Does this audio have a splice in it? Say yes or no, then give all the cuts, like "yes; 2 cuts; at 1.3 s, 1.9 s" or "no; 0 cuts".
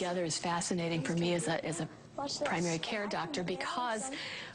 no; 0 cuts